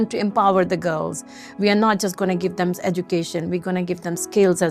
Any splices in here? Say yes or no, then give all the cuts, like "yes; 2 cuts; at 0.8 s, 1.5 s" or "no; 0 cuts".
no; 0 cuts